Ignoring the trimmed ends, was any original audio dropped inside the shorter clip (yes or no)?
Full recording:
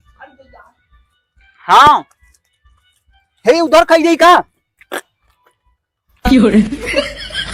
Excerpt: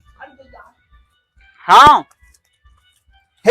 no